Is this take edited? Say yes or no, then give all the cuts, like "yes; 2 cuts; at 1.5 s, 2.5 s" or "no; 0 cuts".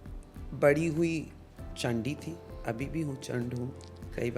yes; 1 cut; at 1.7 s